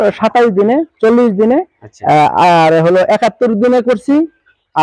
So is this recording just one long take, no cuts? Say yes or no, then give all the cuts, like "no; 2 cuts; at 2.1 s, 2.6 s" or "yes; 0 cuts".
yes; 0 cuts